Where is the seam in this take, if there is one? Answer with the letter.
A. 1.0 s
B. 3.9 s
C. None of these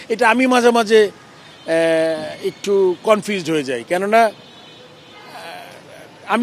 C